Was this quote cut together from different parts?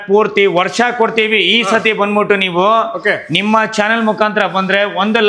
no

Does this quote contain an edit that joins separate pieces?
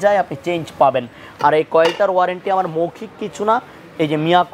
no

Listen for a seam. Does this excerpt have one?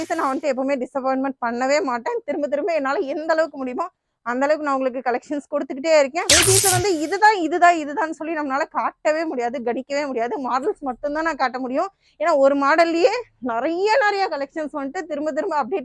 yes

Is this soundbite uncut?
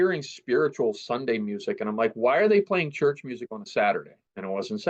yes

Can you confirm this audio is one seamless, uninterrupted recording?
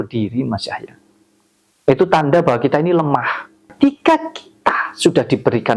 no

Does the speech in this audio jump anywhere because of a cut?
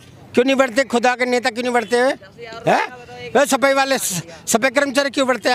no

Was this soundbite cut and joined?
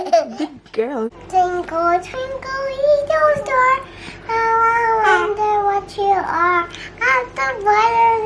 yes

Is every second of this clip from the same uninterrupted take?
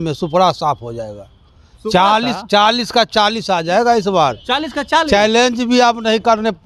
yes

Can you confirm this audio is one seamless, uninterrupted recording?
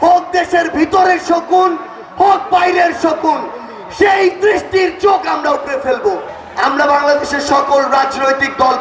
no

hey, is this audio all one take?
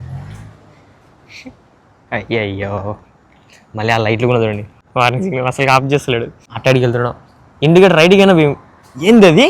no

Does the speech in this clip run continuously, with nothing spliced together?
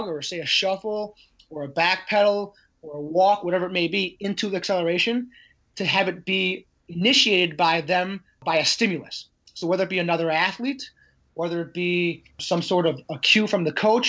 no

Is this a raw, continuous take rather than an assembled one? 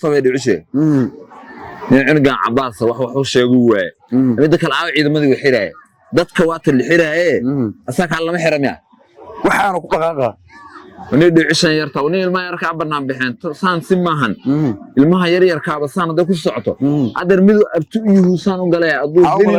yes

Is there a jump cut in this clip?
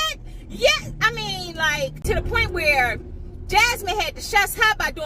yes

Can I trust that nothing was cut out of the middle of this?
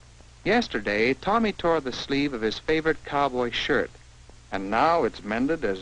no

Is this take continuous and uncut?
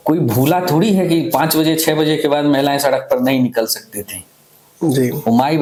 yes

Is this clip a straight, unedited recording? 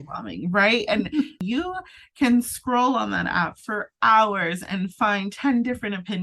no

